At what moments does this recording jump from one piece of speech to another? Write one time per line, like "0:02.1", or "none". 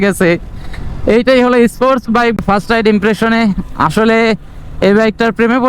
0:02.4